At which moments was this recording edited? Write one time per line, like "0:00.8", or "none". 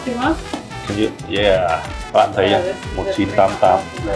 0:01.9